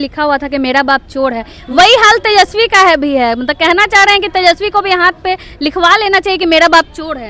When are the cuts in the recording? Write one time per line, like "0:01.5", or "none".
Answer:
none